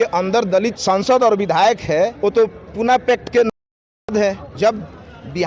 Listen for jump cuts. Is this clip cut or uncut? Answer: cut